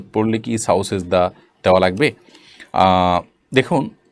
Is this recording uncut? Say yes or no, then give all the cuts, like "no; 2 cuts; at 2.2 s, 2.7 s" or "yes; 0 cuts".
yes; 0 cuts